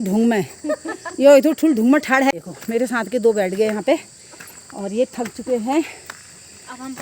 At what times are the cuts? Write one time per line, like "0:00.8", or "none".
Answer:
0:02.3